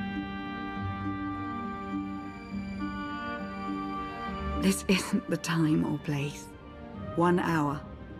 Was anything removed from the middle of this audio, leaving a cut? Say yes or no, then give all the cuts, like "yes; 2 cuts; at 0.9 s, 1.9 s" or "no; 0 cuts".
no; 0 cuts